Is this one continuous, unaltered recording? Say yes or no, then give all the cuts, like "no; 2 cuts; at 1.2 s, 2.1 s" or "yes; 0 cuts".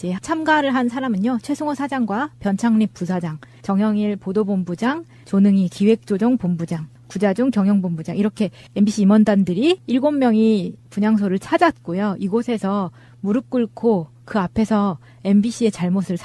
yes; 0 cuts